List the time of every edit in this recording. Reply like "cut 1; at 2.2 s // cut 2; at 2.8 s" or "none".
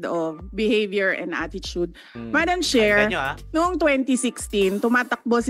none